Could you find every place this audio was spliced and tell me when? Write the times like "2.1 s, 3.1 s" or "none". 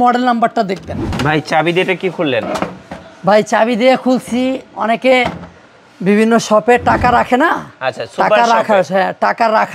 1.0 s